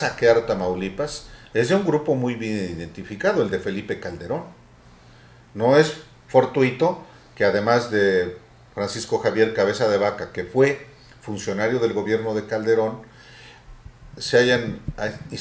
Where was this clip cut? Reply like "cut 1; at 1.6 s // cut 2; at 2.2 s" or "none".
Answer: none